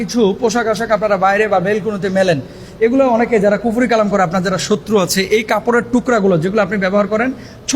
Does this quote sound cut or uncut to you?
uncut